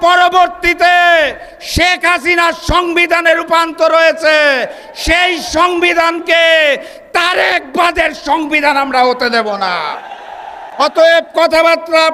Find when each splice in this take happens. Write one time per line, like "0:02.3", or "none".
none